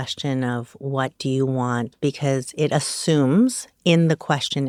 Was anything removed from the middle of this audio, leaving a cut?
no; 0 cuts

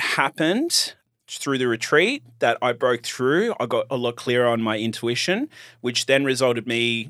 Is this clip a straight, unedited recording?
no; 1 cut; at 1.0 s

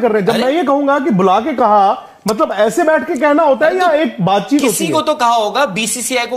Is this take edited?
no; 0 cuts

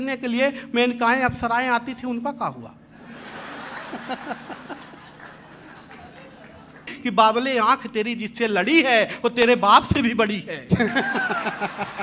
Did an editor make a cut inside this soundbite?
yes; 1 cut; at 6.9 s

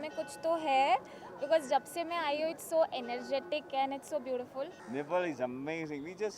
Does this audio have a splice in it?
yes; 1 cut; at 4.8 s

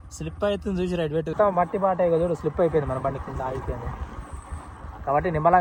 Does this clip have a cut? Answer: no; 0 cuts

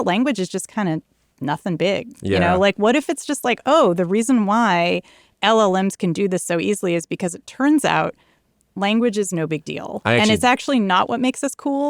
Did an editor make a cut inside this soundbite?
no; 0 cuts

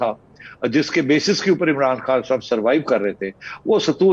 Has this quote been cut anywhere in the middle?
no; 0 cuts

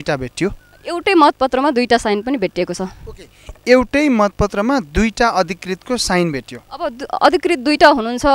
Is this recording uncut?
yes; 0 cuts

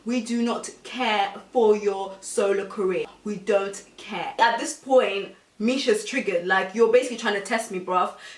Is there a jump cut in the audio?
yes; 2 cuts; at 3.1 s, 4.3 s

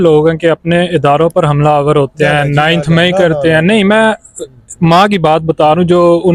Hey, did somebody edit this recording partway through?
no; 0 cuts

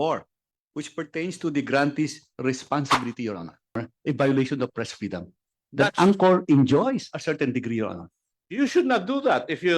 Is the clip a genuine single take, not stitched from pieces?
no; 1 cut; at 3.8 s

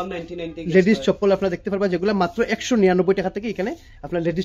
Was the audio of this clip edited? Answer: no; 0 cuts

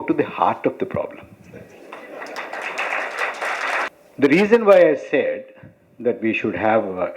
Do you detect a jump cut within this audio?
yes; 1 cut; at 3.9 s

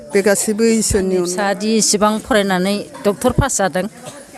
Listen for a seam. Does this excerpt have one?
yes; 1 cut; at 1.3 s

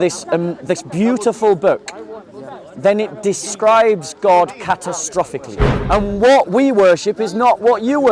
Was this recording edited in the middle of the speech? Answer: yes; 1 cut; at 5.7 s

